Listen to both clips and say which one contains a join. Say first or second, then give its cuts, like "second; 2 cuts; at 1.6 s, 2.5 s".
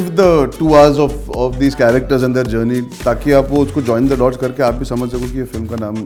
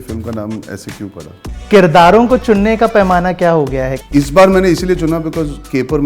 second; 2 cuts; at 1.6 s, 4.0 s